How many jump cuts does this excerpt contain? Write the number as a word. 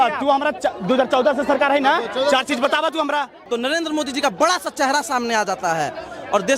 one